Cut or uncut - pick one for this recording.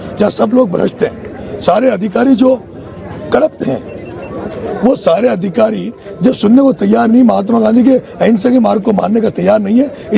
uncut